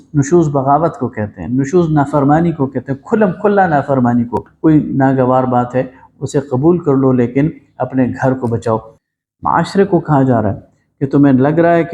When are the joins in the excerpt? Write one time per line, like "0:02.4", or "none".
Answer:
0:04.5
0:09.0